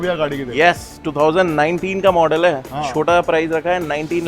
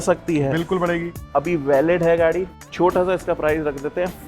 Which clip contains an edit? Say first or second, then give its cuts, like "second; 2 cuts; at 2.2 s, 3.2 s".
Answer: second; 2 cuts; at 1.2 s, 2.6 s